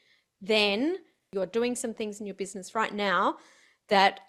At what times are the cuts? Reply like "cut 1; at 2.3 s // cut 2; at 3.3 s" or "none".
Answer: cut 1; at 1.2 s

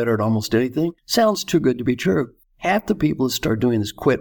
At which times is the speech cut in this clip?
cut 1; at 1.0 s // cut 2; at 2.4 s

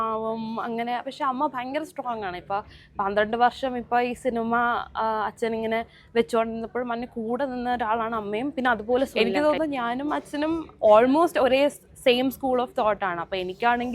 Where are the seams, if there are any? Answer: cut 1; at 9.1 s

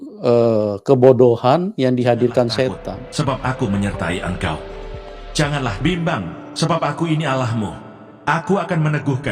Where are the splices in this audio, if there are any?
cut 1; at 3.0 s

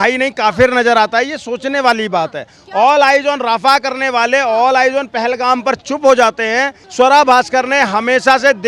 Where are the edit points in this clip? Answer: cut 1; at 6.8 s

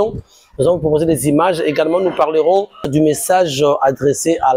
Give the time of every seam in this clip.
cut 1; at 2.9 s

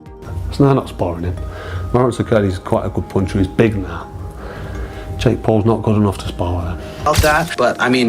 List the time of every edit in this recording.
cut 1; at 7.1 s

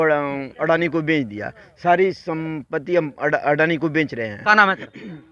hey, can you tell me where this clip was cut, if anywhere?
cut 1; at 4.3 s

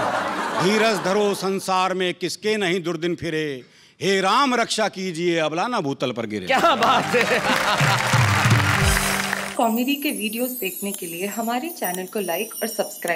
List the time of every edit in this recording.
cut 1; at 9.4 s

